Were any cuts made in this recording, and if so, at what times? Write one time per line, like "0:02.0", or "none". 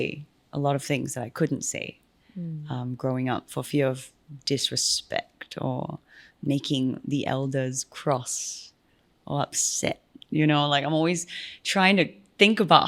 none